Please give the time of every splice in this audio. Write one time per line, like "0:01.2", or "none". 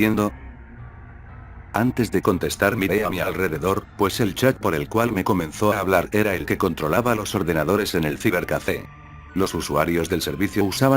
0:01.1